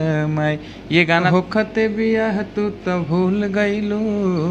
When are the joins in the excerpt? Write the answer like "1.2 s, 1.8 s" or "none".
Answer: 1.3 s